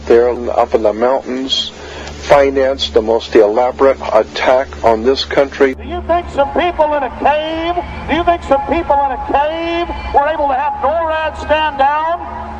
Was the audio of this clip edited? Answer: yes; 1 cut; at 6.7 s

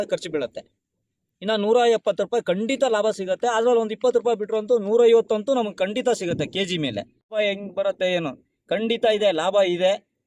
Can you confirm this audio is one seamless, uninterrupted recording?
no; 1 cut; at 7.3 s

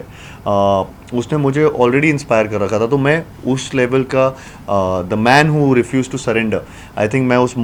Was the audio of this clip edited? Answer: no; 0 cuts

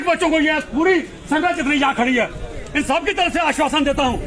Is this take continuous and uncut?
yes; 0 cuts

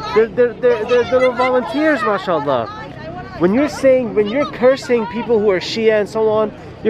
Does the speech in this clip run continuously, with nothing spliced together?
yes; 0 cuts

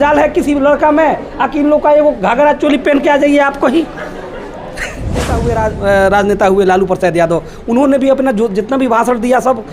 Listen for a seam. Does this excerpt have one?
yes; 1 cut; at 5.3 s

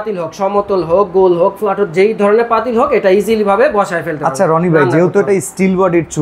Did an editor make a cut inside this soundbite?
no; 0 cuts

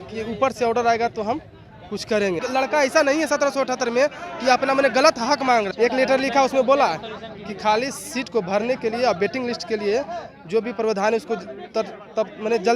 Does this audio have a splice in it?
yes; 2 cuts; at 2.4 s, 5.7 s

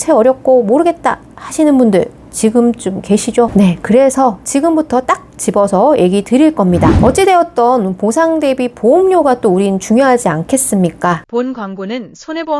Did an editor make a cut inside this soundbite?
yes; 1 cut; at 11.2 s

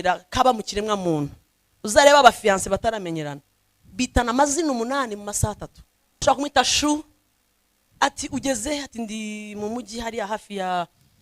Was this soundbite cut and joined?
yes; 1 cut; at 6.2 s

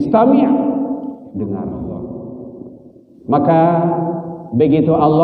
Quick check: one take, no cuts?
no; 1 cut; at 2.4 s

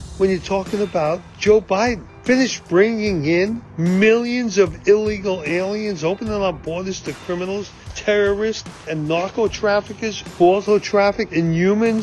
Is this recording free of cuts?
yes; 0 cuts

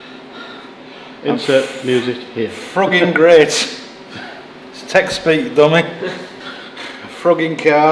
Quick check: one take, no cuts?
yes; 0 cuts

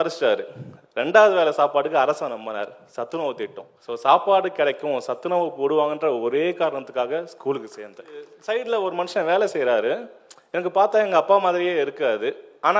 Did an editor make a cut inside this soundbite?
yes; 2 cuts; at 3.7 s, 8.3 s

